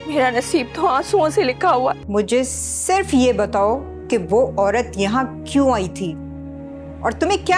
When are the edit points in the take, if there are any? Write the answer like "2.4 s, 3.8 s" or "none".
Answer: 2.0 s